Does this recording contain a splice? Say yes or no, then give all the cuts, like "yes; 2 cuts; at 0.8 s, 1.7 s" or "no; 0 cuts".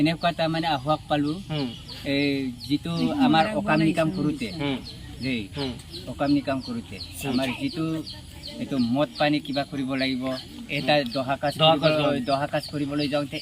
no; 0 cuts